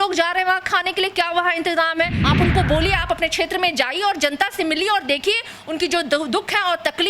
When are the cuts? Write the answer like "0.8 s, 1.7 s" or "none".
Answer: 2.2 s